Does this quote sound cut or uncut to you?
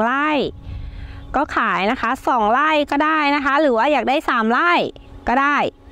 uncut